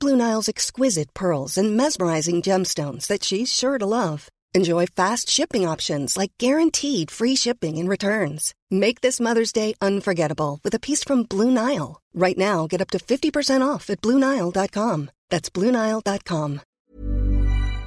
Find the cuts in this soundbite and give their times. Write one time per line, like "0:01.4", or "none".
0:16.7